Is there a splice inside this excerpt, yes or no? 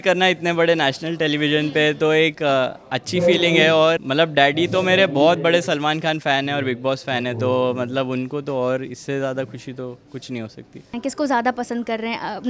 yes